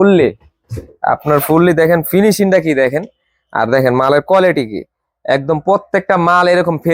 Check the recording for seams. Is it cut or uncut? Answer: uncut